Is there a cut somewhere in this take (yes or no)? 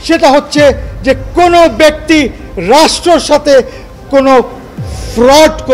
no